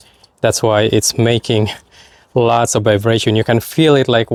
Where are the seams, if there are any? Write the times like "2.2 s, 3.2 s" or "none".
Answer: none